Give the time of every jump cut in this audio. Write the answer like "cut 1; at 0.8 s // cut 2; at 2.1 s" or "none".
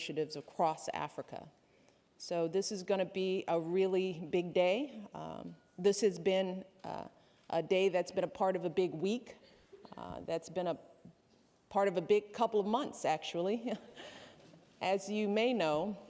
cut 1; at 9.2 s